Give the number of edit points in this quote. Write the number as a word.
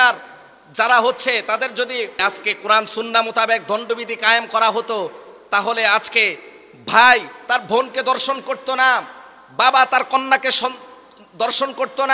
one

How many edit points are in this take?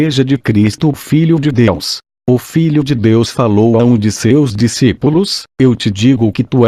one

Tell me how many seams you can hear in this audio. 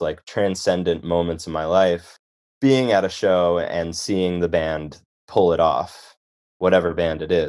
one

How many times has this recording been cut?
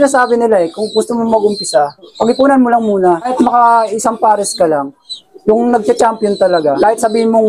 five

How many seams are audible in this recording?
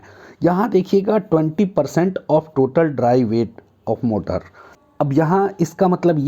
one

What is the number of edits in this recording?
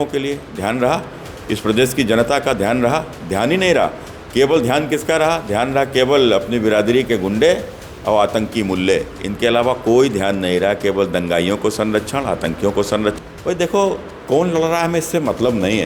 one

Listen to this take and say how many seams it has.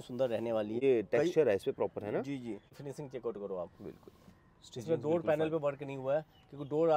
two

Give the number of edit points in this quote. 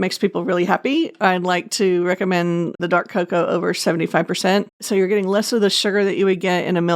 one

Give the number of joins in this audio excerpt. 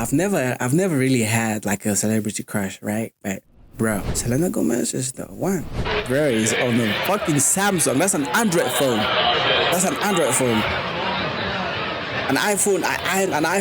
two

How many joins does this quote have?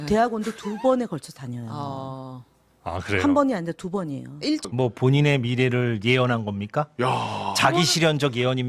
one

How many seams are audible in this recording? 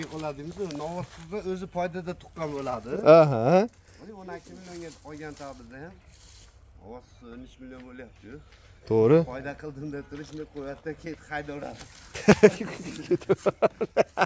zero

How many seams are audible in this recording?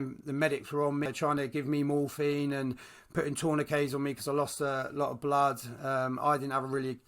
one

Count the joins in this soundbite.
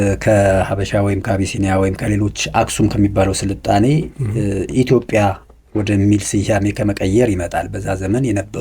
zero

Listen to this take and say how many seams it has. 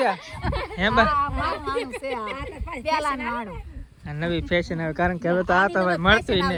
zero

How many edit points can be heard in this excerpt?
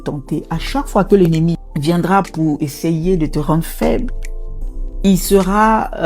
one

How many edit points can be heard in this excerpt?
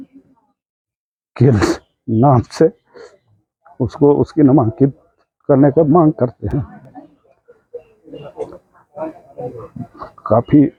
zero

